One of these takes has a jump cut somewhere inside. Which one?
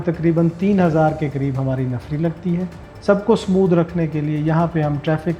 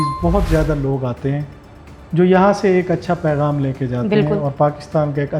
first; 1 cut; at 2.8 s

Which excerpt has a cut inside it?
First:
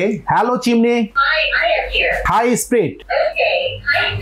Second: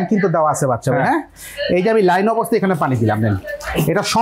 first; 3 cuts; at 1.2 s, 2.2 s, 3.0 s

